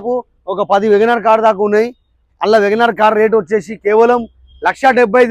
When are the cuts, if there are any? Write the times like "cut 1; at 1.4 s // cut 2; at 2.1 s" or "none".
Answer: none